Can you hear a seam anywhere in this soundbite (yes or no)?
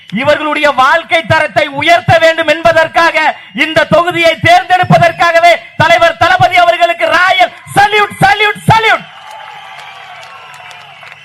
no